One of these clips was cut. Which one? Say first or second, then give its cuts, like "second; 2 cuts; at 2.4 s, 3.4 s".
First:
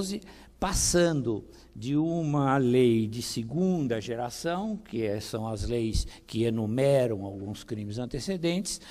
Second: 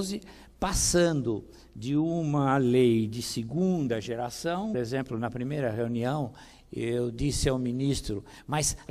first; 1 cut; at 4.8 s